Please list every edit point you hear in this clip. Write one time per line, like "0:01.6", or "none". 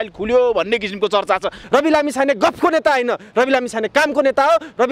0:01.6